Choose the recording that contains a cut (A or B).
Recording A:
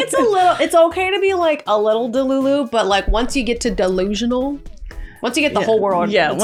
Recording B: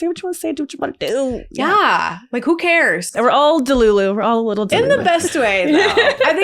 B